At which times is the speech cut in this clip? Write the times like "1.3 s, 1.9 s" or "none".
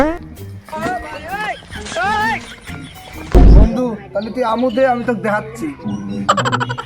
3.3 s